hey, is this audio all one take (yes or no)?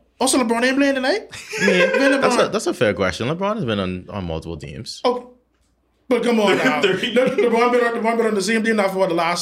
yes